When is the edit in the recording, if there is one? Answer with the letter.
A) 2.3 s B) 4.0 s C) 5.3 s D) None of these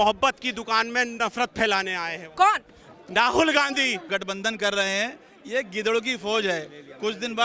B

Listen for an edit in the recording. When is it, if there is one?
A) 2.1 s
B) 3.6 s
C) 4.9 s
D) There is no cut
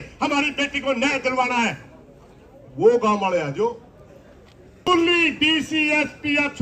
C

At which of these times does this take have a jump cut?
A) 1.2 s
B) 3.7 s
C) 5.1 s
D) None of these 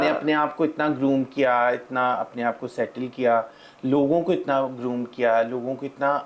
D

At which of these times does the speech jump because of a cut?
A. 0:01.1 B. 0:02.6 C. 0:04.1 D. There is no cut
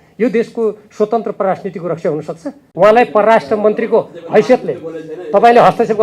B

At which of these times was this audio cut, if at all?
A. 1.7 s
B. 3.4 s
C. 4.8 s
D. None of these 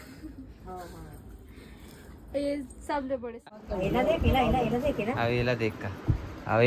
B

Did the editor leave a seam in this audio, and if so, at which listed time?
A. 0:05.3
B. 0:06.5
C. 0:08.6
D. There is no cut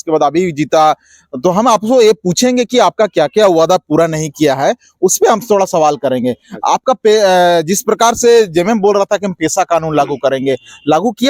D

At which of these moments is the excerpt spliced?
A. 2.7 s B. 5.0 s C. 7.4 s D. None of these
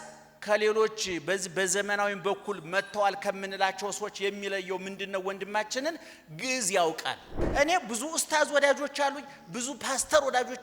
C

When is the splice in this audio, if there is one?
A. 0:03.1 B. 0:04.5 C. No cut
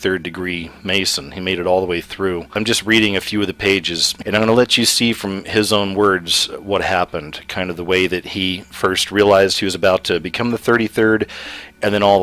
A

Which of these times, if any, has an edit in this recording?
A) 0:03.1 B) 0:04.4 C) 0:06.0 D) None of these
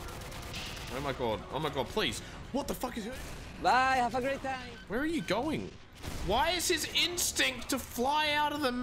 A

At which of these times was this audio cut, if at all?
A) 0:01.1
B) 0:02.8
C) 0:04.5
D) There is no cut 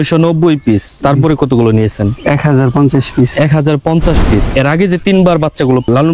C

